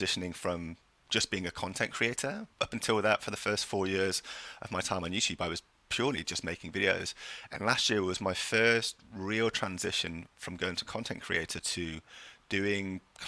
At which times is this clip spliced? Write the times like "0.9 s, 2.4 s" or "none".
2.5 s